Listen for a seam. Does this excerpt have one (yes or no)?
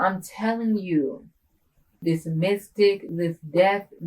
yes